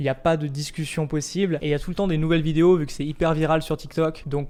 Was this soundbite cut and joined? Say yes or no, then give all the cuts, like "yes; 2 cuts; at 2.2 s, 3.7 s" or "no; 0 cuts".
no; 0 cuts